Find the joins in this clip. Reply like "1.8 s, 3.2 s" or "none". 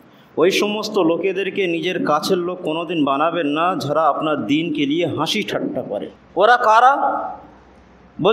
6.1 s